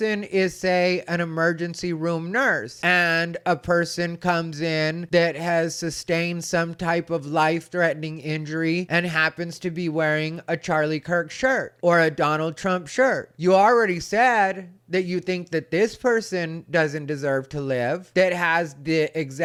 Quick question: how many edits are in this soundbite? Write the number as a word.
zero